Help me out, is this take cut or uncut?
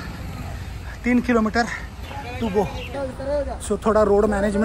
cut